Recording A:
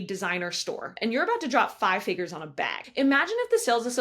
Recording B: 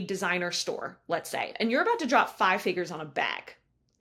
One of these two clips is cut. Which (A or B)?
A